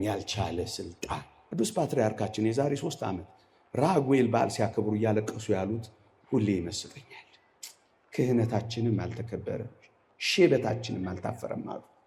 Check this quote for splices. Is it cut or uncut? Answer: cut